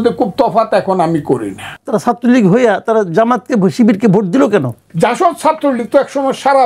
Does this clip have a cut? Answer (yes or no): yes